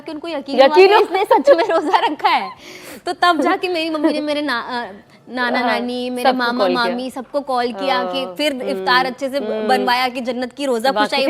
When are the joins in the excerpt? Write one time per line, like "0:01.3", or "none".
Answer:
none